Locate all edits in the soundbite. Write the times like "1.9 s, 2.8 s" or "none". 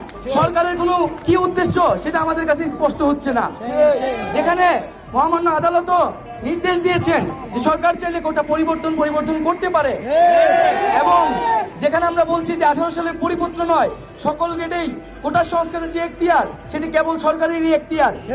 none

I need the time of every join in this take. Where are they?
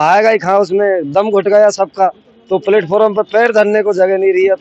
none

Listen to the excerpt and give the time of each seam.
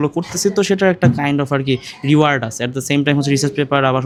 none

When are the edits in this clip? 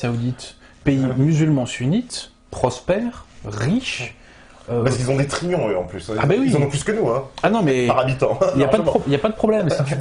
none

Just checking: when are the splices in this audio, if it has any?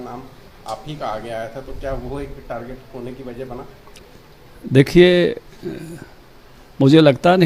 none

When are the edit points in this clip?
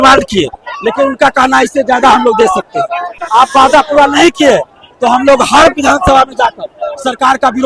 3.2 s

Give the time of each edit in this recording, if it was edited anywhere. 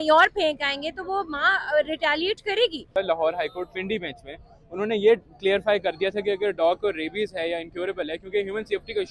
2.9 s

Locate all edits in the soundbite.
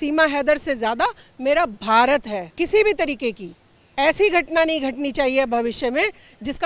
2.4 s

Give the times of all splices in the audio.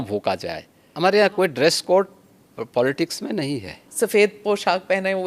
0.9 s, 3.9 s

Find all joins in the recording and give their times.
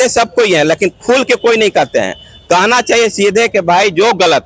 none

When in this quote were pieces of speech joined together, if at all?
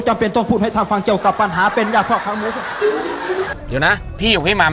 3.6 s

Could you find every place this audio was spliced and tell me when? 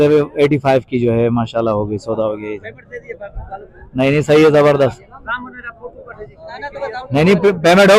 none

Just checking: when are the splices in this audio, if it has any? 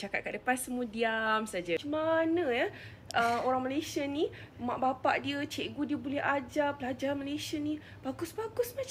1.8 s

